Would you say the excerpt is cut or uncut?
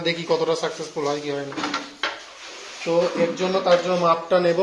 uncut